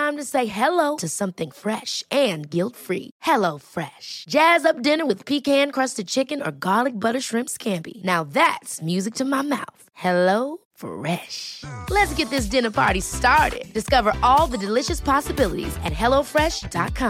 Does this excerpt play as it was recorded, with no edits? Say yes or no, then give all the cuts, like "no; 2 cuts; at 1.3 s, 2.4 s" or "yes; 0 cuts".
yes; 0 cuts